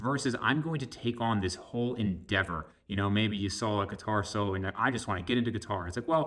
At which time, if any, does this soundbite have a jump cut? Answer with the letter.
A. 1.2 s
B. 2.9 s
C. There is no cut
C